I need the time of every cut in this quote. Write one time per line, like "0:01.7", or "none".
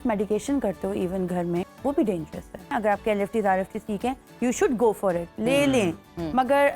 0:01.7
0:02.7